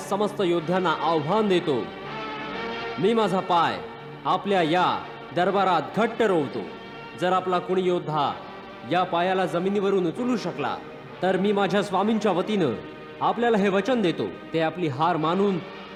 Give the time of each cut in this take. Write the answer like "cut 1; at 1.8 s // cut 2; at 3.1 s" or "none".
none